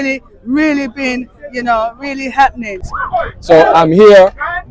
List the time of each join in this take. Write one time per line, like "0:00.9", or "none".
0:02.8